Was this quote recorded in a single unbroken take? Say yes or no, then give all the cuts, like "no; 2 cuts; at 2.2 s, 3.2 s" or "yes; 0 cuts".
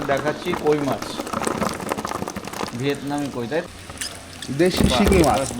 no; 1 cut; at 3.7 s